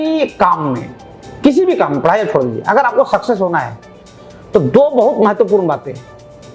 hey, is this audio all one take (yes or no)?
yes